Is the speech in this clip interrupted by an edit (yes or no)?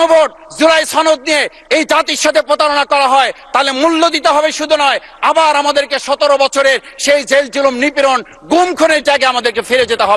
no